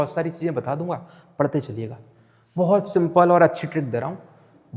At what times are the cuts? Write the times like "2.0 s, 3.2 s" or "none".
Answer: none